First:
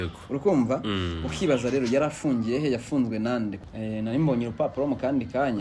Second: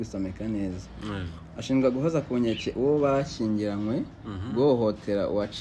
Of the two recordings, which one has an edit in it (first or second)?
first